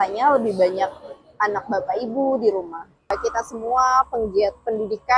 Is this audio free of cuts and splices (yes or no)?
no